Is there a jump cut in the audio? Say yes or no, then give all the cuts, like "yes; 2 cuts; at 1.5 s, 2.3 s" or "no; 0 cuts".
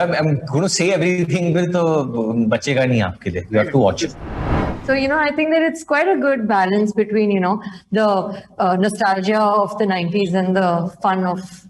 yes; 1 cut; at 4.4 s